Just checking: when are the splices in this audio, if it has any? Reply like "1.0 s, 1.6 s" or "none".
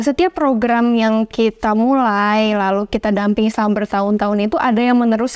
none